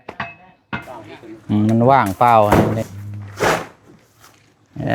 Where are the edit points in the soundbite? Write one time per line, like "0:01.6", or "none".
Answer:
0:02.5